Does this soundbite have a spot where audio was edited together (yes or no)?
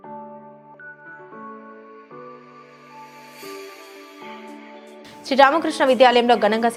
no